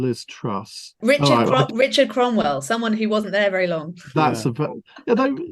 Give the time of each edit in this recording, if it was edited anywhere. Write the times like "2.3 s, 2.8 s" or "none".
0.9 s